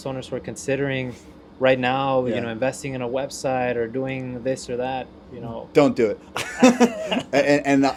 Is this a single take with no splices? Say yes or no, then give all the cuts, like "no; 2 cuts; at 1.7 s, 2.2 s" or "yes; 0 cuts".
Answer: yes; 0 cuts